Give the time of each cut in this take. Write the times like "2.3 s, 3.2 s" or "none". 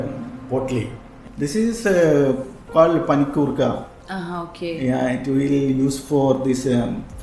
1.1 s